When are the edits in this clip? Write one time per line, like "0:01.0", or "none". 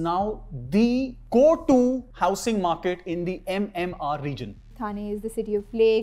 0:02.1
0:04.7